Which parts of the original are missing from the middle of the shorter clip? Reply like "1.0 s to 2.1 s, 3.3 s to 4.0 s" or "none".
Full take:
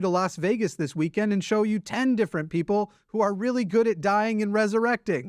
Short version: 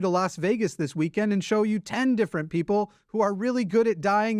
none